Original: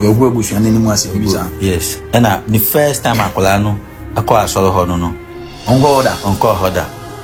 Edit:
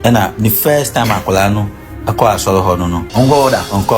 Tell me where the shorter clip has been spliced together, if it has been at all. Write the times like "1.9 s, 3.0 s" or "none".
3.0 s

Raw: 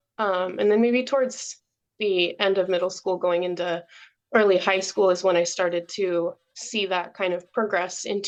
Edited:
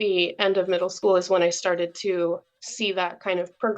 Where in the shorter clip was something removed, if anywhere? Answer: 1.0 s

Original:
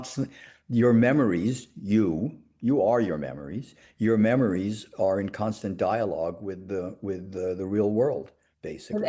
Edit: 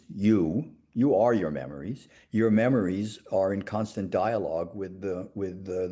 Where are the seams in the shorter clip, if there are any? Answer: none

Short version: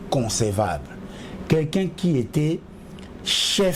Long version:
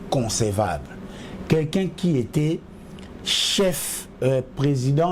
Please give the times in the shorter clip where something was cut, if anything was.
none

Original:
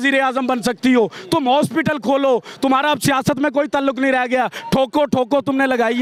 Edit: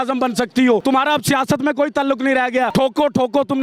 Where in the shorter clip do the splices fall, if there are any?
0.8 s, 2.7 s

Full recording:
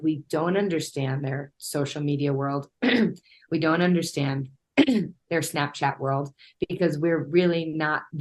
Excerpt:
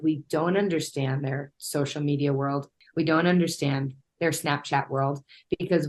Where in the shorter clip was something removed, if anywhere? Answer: 2.7 s, 4.1 s

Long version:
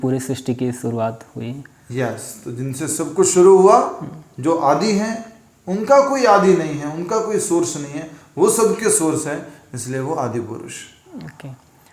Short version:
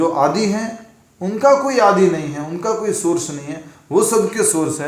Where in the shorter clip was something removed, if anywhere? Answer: none

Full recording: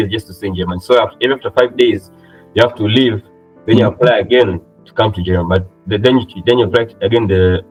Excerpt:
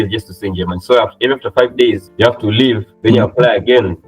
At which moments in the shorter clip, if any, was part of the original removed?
2.1 s, 2.9 s

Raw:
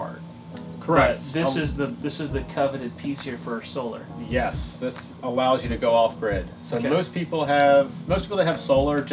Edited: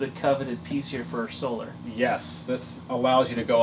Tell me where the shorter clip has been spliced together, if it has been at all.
none

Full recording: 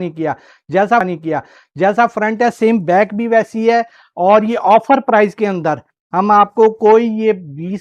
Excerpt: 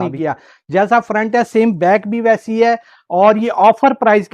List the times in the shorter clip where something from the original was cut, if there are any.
1.0 s

